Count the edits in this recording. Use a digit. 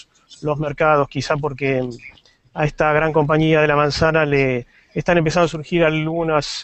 0